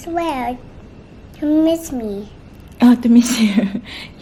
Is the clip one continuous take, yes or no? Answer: yes